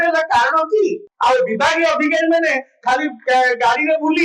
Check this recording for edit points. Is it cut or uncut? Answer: cut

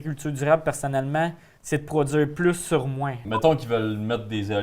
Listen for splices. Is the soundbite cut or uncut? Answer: cut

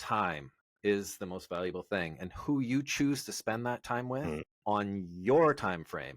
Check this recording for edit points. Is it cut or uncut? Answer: cut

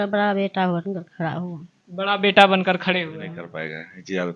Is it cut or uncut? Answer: cut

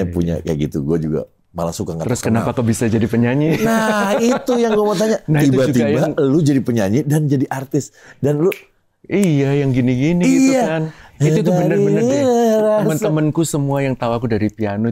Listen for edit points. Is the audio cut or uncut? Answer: uncut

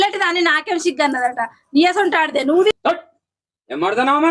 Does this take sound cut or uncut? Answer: cut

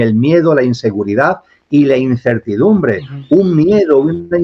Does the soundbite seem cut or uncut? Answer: uncut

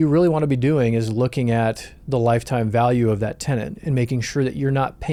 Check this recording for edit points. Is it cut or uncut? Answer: uncut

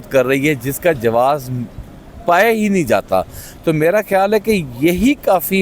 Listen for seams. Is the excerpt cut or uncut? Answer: uncut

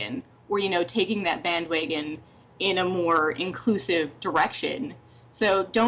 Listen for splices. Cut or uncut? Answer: uncut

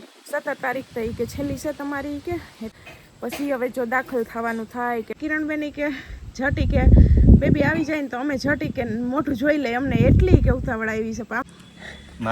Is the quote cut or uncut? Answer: cut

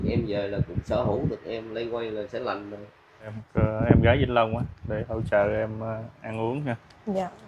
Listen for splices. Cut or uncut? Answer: cut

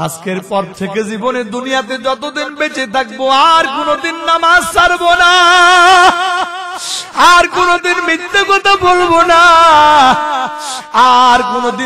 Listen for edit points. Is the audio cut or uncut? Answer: uncut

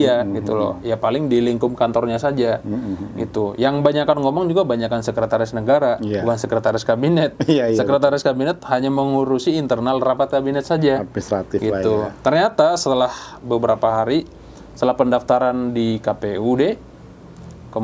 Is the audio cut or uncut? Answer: uncut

